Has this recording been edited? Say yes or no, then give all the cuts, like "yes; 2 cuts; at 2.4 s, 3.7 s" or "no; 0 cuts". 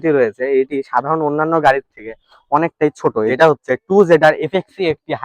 yes; 1 cut; at 3.3 s